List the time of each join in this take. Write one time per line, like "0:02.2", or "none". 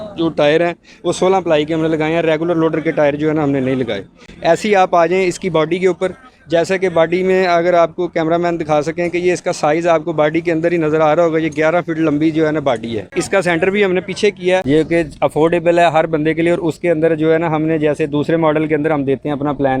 0:14.6